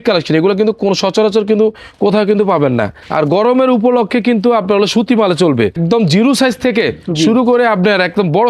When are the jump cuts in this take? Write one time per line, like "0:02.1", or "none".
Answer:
0:03.0
0:05.7